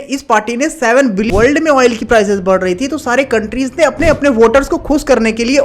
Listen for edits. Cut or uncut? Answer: cut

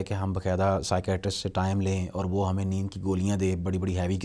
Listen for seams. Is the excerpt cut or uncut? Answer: uncut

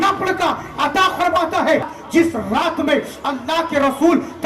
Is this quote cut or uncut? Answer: cut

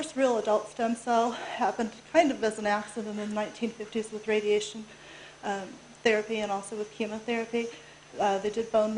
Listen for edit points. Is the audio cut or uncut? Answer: uncut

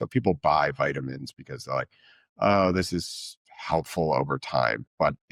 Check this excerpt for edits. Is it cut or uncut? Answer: uncut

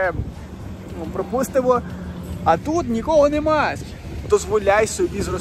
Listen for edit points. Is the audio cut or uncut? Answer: cut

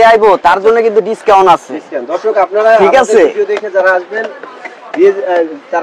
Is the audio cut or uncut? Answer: uncut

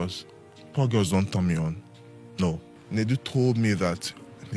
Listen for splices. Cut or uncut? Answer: cut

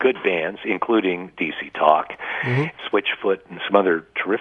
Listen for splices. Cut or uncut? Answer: cut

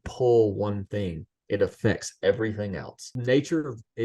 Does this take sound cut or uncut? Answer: cut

